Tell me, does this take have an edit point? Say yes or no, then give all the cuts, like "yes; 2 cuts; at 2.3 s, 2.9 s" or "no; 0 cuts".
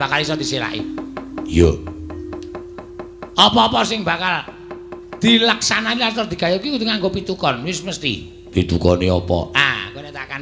no; 0 cuts